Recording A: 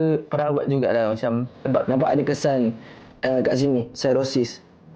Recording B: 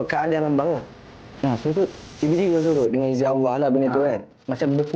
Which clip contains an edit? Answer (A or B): A